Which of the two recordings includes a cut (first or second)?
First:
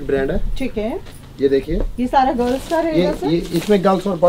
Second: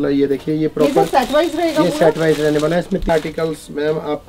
second